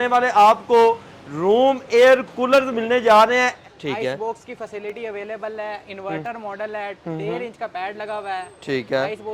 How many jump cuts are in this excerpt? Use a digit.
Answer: 1